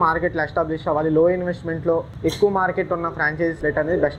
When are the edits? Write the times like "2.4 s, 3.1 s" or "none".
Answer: 2.1 s